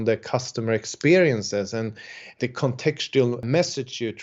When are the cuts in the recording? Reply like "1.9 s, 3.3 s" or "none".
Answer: 2.4 s, 3.4 s